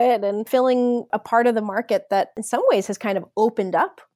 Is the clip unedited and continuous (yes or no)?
no